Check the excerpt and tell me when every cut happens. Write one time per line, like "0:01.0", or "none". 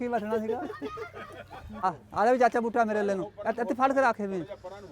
0:01.8